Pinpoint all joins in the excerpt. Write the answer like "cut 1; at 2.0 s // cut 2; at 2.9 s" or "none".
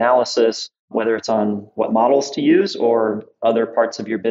cut 1; at 1.7 s // cut 2; at 3.3 s

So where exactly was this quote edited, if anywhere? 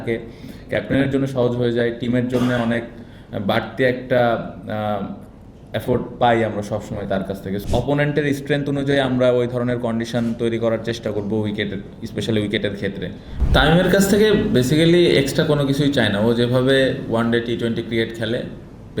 cut 1; at 7.6 s // cut 2; at 13.3 s

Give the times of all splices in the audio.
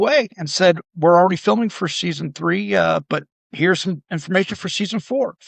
none

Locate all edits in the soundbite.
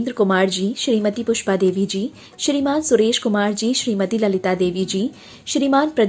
none

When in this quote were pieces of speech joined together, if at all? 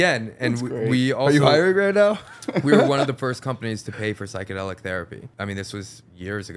cut 1; at 5.2 s

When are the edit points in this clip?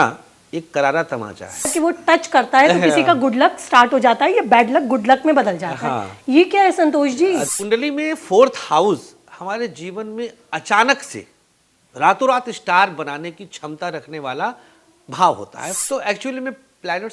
cut 1; at 1.7 s // cut 2; at 7.5 s // cut 3; at 15.7 s

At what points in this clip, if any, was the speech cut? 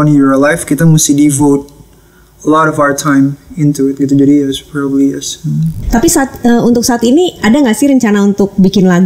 cut 1; at 5.7 s

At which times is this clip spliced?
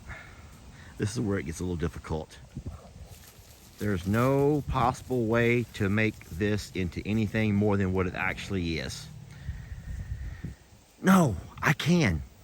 cut 1; at 2.4 s

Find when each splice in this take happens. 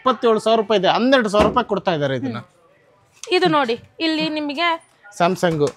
none

